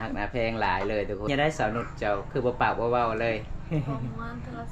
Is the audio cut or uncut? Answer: cut